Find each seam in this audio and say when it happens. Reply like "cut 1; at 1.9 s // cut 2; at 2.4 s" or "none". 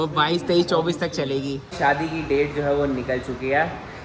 cut 1; at 1.7 s